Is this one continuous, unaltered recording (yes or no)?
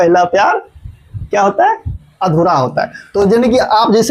yes